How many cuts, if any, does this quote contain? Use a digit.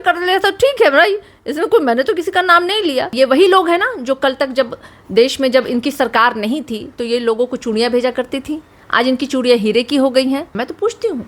2